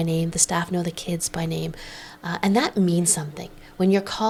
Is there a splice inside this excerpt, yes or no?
no